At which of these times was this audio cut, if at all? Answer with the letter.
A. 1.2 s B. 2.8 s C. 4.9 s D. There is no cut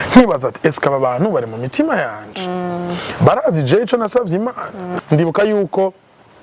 C